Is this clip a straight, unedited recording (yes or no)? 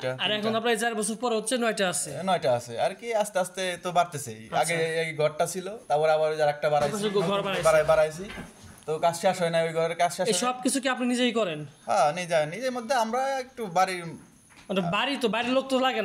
yes